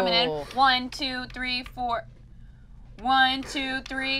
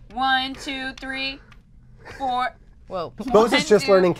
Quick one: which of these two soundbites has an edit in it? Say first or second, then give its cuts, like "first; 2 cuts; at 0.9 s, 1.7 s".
second; 1 cut; at 3.1 s